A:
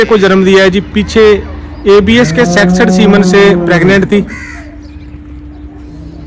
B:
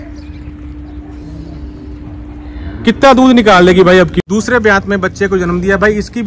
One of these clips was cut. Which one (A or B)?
B